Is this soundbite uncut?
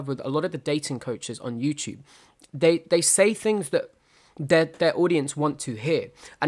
yes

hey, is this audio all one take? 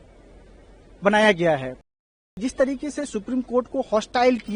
no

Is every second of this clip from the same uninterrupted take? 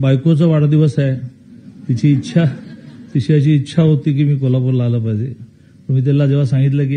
yes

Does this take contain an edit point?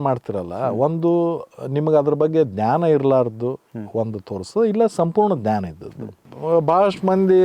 no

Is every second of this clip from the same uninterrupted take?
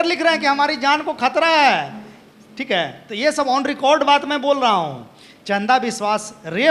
yes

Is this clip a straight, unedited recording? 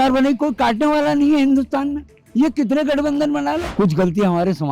no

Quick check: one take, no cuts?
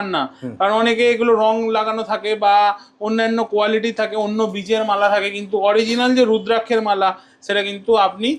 yes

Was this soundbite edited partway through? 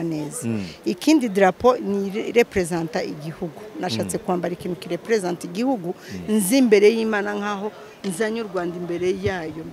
no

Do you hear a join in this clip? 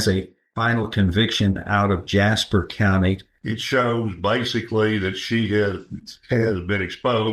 yes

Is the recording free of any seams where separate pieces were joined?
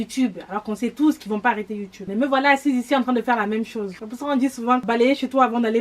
no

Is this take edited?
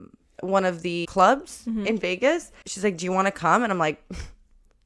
yes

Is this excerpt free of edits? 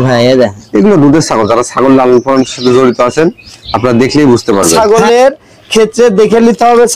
no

